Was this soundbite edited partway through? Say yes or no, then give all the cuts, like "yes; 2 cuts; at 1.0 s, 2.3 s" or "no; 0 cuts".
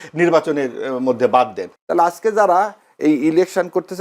yes; 1 cut; at 1.6 s